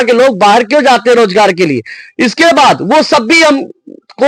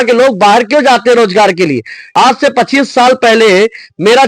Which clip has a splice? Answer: second; 1 cut; at 2.0 s

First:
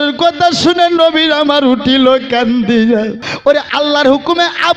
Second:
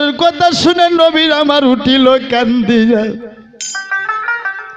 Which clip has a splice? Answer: first; 1 cut; at 3.2 s

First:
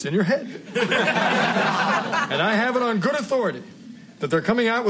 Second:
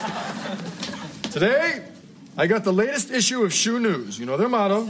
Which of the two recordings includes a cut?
first; 1 cut; at 1.5 s

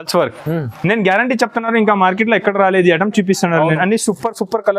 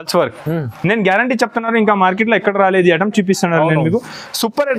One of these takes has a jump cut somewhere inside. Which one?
first; 1 cut; at 3.8 s

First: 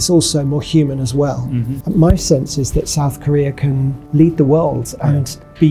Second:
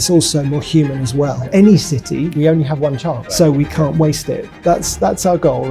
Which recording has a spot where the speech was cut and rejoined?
second; 4 cuts; at 1.4 s, 2.3 s, 3.2 s, 4.5 s

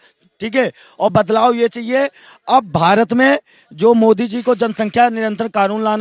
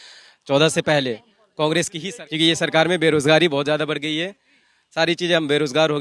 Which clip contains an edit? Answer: second; 1 cut; at 2.0 s

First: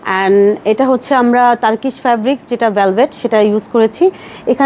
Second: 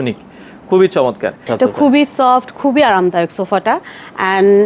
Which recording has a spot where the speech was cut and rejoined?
second; 1 cut; at 1.4 s

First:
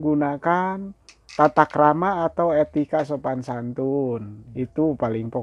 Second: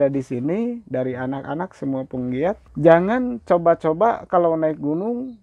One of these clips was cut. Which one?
second; 1 cut; at 2.7 s

